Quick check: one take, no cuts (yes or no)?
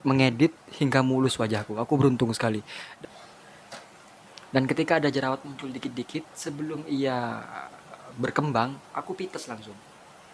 no